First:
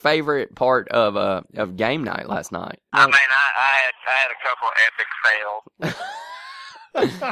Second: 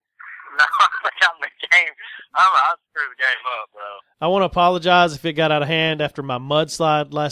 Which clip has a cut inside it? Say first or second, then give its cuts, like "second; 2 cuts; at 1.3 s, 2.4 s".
first; 1 cut; at 2.8 s